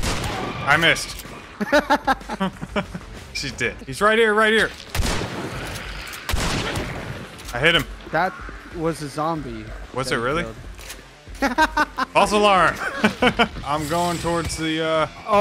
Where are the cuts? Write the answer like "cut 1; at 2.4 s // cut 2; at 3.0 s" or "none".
cut 1; at 3.9 s // cut 2; at 13.6 s